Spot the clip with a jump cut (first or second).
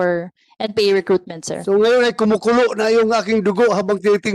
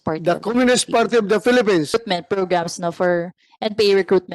second